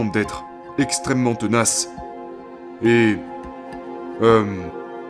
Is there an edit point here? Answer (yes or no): no